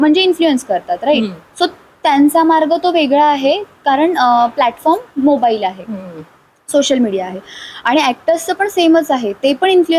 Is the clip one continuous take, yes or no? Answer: yes